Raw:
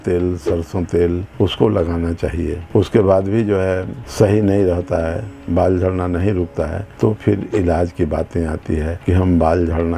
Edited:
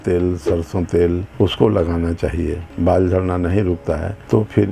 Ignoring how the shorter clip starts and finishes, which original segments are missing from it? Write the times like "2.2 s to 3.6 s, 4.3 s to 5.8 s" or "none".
2.6 s to 5.3 s